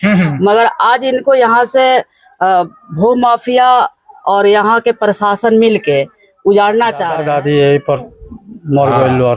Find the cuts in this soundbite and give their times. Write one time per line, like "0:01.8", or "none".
0:07.2